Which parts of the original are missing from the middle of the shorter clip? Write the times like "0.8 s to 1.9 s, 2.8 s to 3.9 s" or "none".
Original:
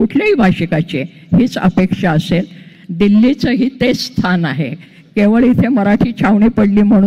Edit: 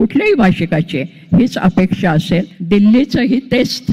2.5 s to 2.8 s